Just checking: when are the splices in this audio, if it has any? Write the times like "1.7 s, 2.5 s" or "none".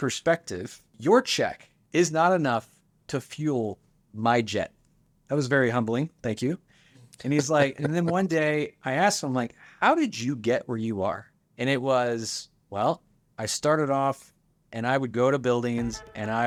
none